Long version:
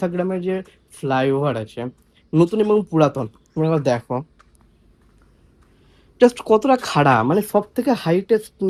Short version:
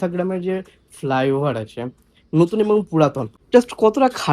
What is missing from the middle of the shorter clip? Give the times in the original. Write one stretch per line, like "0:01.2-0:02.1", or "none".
0:03.3-0:06.0